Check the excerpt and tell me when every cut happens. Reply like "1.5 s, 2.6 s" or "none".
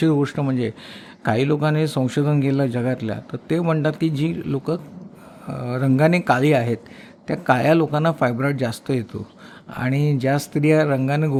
none